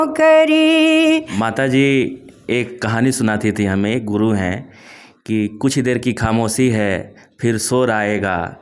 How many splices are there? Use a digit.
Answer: 1